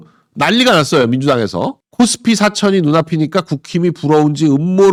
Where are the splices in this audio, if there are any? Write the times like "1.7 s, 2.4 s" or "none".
none